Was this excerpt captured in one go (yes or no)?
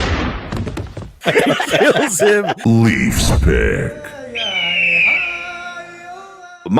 no